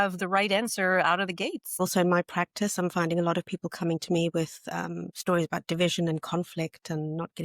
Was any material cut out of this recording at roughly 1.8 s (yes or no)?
yes